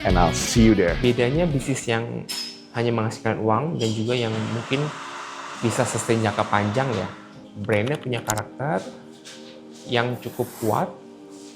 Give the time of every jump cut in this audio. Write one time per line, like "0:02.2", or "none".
0:01.0